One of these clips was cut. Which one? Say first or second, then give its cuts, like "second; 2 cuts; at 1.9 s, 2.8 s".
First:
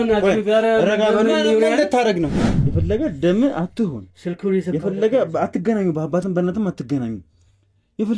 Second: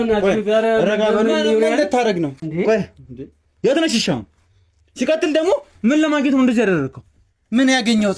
first; 1 cut; at 2.4 s